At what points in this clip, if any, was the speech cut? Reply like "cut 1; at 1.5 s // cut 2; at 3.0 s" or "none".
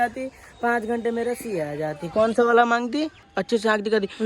cut 1; at 3.2 s